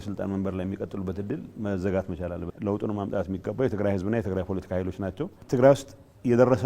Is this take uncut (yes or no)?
no